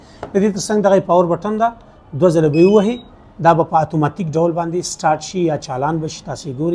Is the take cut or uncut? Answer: uncut